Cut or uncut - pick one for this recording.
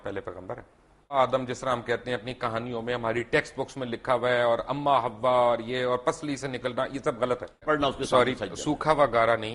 cut